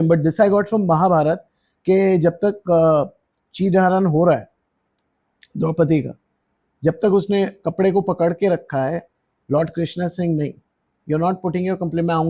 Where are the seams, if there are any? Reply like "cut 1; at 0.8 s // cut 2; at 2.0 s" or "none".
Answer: none